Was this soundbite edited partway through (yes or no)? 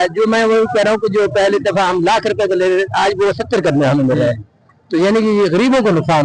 no